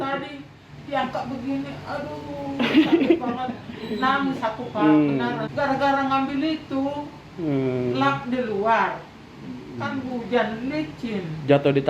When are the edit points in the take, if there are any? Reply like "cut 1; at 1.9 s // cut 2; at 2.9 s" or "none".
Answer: cut 1; at 5.5 s